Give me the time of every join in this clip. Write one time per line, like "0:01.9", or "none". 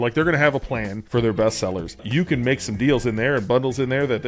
0:01.0
0:02.1